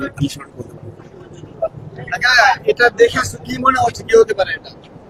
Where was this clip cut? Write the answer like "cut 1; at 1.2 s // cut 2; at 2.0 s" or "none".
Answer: none